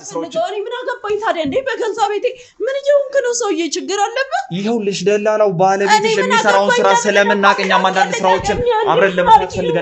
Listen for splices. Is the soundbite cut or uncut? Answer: uncut